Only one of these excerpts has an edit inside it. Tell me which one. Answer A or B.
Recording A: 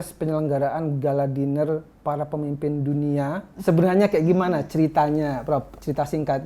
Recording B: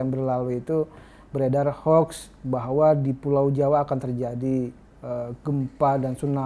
A